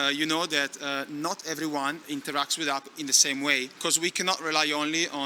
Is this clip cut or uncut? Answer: cut